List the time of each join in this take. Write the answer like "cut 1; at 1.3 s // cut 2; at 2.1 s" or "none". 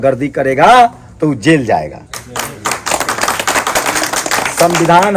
none